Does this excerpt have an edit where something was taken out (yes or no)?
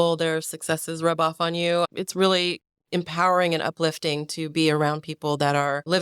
yes